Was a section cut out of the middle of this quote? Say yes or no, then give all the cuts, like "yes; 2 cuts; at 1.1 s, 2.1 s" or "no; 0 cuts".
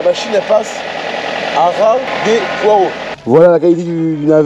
yes; 1 cut; at 3.1 s